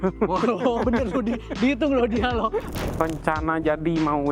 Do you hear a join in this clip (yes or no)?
yes